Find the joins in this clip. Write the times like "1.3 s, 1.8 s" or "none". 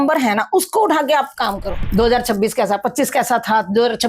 1.8 s